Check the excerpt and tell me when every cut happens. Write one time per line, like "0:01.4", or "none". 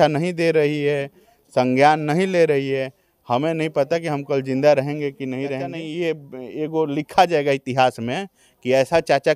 0:05.8